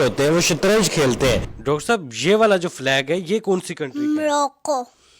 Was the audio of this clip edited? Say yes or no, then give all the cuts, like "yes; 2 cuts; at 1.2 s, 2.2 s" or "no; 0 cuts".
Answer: yes; 1 cut; at 1.5 s